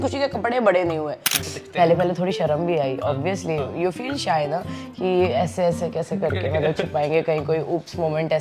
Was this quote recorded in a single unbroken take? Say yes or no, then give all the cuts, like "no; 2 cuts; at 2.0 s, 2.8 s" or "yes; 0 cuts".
no; 1 cut; at 1.3 s